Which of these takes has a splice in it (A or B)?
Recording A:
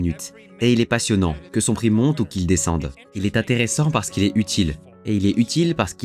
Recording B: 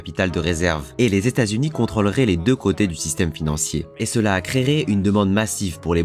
B